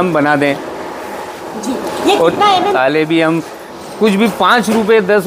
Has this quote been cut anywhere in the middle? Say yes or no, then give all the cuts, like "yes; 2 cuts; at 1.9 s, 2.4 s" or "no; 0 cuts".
yes; 1 cut; at 2.7 s